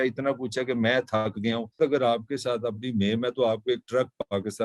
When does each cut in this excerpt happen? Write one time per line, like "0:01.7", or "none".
0:01.8